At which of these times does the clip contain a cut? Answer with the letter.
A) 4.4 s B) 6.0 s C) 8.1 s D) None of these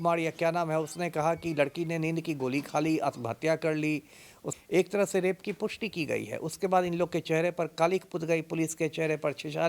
A